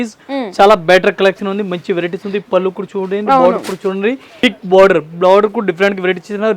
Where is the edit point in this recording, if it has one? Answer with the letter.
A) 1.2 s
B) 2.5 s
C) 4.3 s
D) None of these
C